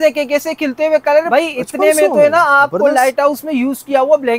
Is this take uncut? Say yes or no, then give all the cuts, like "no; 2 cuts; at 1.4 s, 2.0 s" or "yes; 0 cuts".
no; 1 cut; at 1.3 s